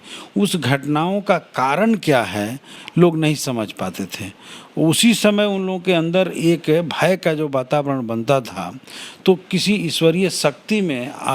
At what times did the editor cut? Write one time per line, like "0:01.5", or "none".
0:02.7